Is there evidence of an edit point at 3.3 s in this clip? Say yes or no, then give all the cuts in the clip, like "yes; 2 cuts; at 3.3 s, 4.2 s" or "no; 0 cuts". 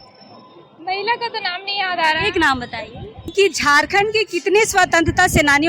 yes; 1 cut; at 3.3 s